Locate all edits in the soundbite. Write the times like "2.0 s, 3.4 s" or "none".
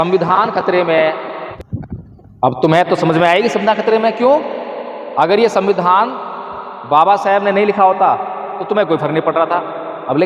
1.4 s